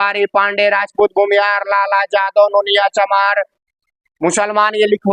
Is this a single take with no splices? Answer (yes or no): yes